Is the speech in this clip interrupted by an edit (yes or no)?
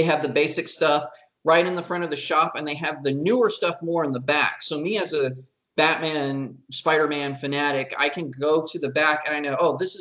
no